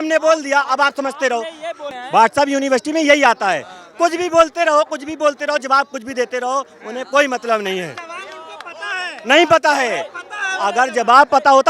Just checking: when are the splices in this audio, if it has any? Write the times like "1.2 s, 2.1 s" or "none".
1.8 s

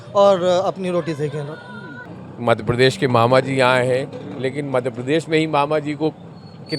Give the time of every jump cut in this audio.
1.9 s

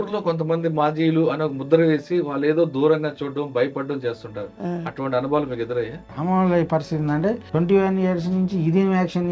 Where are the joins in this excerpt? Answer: 6.1 s, 7.4 s

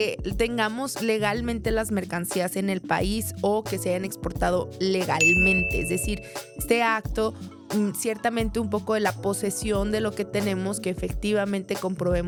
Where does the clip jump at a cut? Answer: none

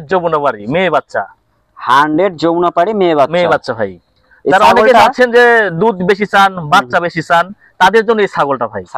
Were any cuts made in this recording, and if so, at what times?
none

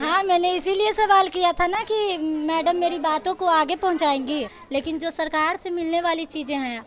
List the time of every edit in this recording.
4.6 s

